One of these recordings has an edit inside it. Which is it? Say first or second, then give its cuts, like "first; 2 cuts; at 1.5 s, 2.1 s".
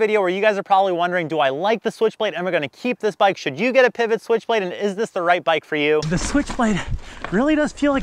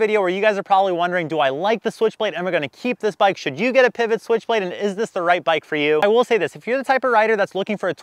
first; 1 cut; at 6.0 s